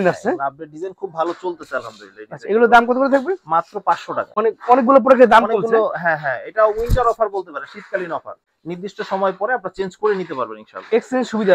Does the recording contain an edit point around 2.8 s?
no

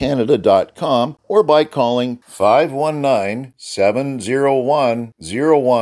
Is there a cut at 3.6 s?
no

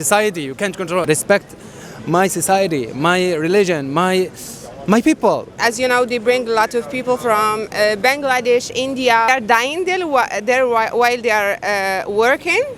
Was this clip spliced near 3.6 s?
no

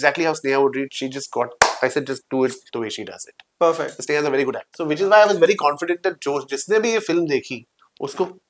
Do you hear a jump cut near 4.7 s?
yes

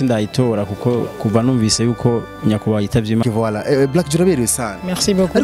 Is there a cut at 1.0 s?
no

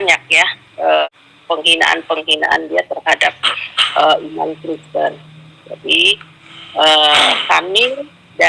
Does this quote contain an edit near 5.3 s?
no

